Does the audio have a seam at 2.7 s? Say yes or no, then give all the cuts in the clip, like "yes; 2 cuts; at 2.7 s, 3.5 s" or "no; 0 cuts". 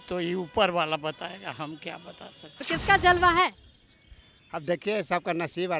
yes; 1 cut; at 2.7 s